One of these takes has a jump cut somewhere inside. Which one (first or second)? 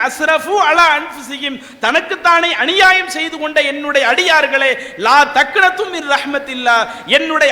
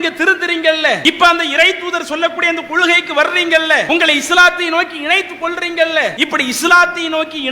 second